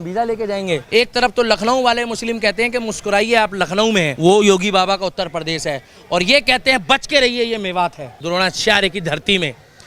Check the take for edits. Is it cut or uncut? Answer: cut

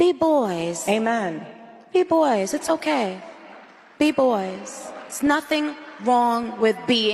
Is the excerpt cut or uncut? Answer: uncut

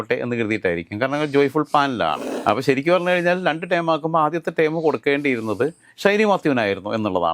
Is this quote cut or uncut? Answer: cut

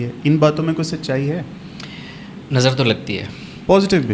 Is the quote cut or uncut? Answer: uncut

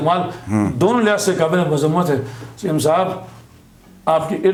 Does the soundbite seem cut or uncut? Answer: uncut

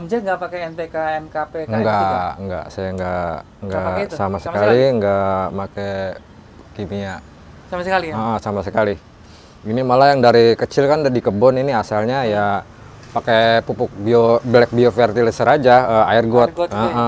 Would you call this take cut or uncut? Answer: uncut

